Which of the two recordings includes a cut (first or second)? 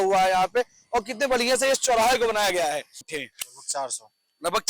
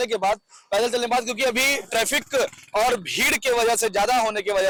first